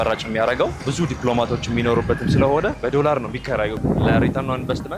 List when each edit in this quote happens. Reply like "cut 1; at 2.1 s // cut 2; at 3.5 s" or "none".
cut 1; at 0.9 s // cut 2; at 2.8 s // cut 3; at 3.8 s